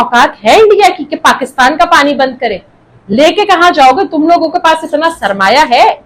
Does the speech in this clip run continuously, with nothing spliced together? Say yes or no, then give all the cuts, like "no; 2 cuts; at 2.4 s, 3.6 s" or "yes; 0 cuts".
yes; 0 cuts